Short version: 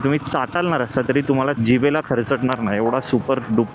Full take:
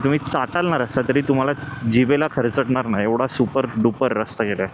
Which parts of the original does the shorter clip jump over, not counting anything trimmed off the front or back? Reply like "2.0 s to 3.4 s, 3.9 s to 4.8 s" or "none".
1.6 s to 1.8 s